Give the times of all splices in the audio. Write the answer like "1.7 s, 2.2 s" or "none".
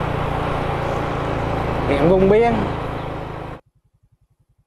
3.3 s

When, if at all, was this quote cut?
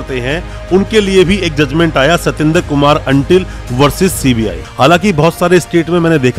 4.6 s

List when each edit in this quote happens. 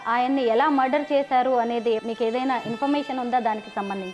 2.0 s

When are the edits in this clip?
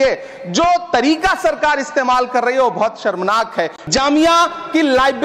3.8 s

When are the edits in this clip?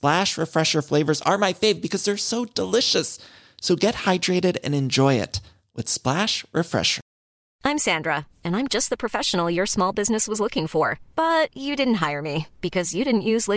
7.4 s

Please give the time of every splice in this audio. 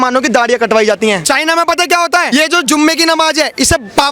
1.2 s, 2.3 s

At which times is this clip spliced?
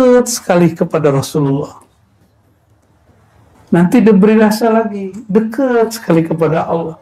none

